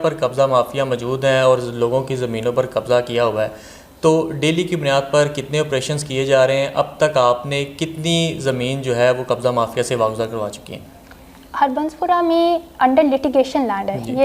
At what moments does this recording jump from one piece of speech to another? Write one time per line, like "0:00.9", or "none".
none